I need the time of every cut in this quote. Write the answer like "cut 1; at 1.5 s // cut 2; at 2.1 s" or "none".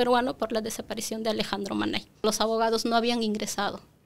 cut 1; at 2.2 s